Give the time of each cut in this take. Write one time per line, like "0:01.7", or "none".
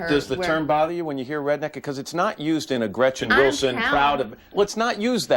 none